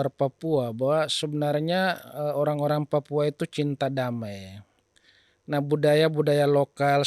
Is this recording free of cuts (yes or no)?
yes